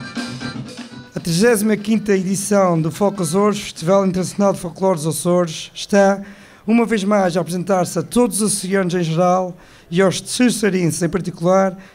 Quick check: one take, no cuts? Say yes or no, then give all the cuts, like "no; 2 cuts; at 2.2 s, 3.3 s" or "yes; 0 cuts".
no; 1 cut; at 1.0 s